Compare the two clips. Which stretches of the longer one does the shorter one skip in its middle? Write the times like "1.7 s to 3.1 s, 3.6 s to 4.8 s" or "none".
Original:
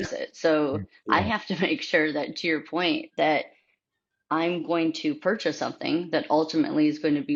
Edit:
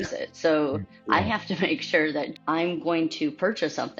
2.3 s to 4.2 s